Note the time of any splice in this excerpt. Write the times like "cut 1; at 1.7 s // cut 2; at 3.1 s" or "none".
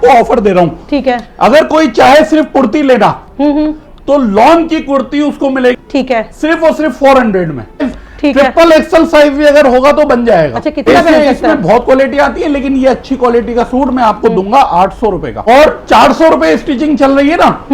cut 1; at 5.8 s // cut 2; at 7.8 s // cut 3; at 10.9 s // cut 4; at 15.4 s